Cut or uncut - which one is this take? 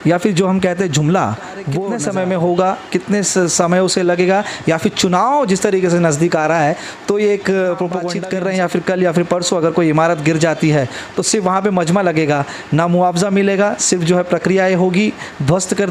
cut